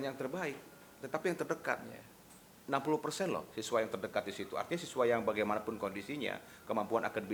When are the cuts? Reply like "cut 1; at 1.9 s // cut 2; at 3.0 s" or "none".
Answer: none